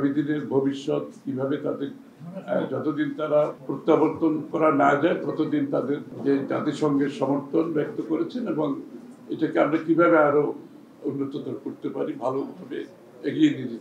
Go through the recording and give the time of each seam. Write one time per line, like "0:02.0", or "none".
0:03.7
0:04.5
0:06.1